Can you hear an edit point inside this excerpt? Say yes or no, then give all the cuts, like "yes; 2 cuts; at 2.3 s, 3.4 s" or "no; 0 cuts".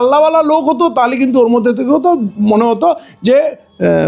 no; 0 cuts